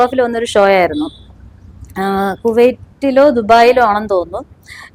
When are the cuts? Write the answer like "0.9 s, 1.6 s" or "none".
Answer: none